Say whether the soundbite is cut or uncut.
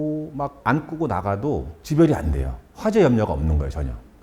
uncut